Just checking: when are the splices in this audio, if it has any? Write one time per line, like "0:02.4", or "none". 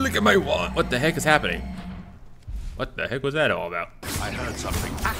none

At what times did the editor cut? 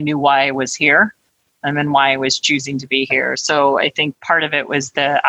0:04.2

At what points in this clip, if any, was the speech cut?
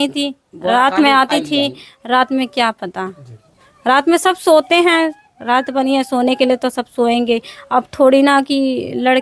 none

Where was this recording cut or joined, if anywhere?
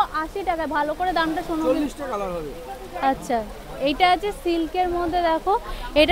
0:01.6

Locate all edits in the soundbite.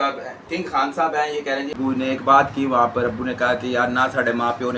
0:01.7

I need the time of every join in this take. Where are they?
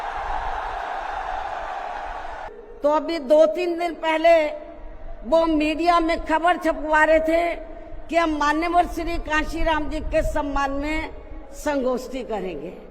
0:02.6

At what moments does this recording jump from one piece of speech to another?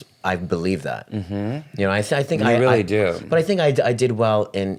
none

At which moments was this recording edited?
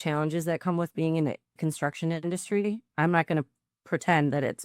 0:01.6

